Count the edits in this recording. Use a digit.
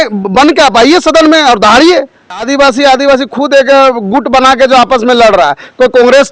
1